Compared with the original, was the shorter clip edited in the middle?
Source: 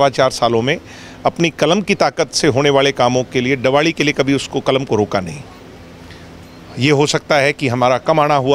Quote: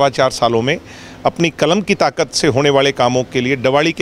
no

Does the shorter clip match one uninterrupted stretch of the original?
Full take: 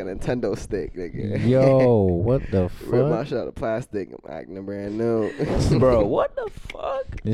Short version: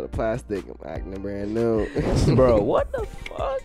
yes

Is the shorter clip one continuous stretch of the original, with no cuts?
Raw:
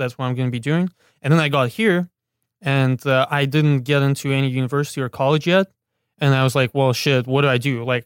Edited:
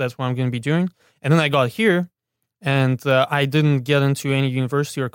yes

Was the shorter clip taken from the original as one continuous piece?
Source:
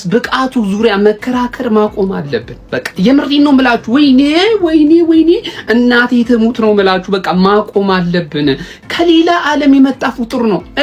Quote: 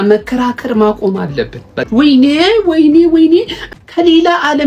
no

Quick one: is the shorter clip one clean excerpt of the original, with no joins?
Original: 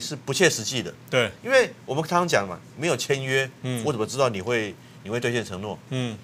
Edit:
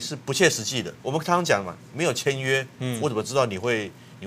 no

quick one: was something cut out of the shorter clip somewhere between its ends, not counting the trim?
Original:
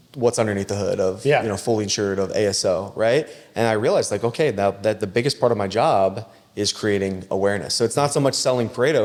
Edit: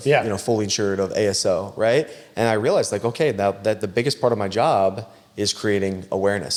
no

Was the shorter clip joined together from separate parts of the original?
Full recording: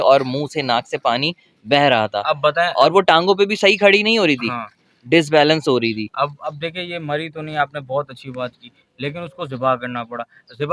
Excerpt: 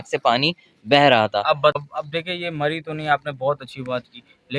yes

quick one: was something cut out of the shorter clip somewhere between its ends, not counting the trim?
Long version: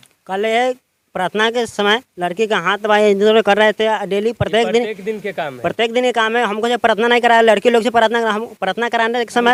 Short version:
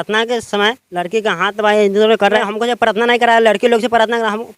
yes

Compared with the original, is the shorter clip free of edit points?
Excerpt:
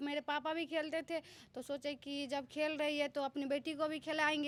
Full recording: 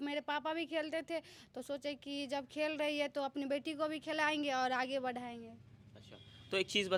yes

